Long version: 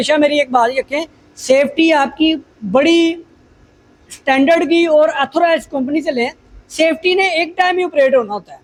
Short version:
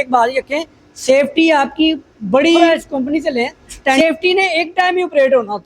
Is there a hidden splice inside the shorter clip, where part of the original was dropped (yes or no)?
yes